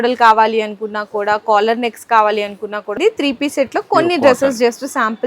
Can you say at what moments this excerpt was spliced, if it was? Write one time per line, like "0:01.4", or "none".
0:02.9